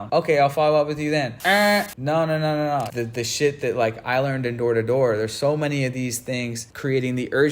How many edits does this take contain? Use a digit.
3